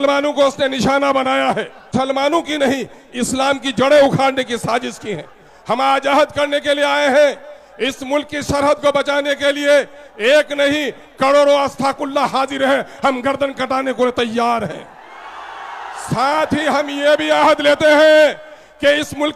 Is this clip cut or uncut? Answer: cut